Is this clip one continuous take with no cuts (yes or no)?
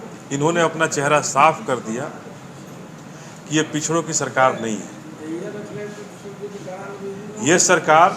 yes